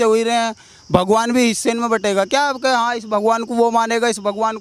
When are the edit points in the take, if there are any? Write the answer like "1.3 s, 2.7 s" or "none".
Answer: none